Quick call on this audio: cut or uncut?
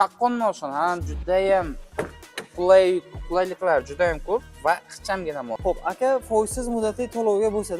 cut